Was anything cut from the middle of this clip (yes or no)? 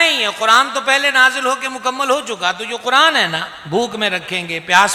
no